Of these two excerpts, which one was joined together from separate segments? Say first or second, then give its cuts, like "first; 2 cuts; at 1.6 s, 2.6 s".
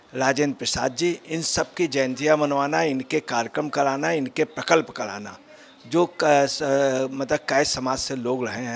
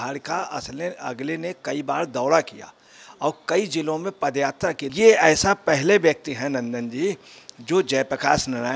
second; 1 cut; at 4.9 s